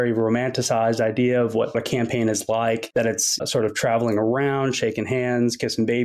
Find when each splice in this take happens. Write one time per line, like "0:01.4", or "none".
0:01.8
0:03.4

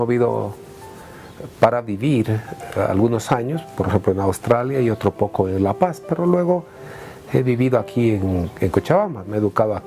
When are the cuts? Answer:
0:03.2

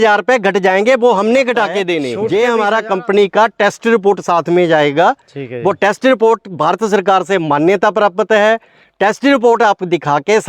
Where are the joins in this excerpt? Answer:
0:01.9

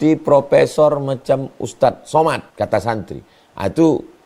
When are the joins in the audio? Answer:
0:02.5

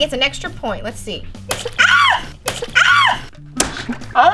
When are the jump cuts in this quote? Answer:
0:01.3

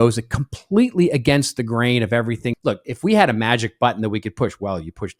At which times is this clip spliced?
0:02.5

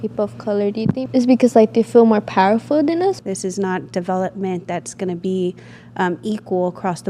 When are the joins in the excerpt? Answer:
0:01.1
0:03.2

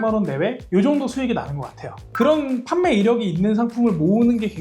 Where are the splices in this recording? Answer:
0:02.0

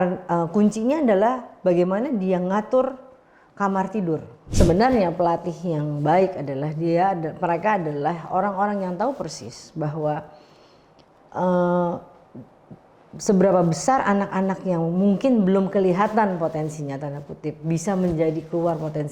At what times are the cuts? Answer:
0:04.4

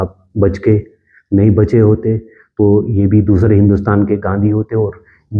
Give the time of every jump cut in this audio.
none

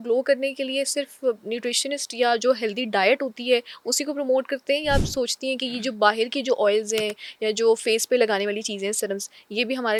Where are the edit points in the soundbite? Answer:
none

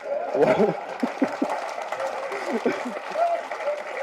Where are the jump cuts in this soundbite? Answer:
none

